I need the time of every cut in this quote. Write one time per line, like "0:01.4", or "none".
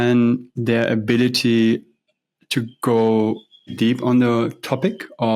0:03.7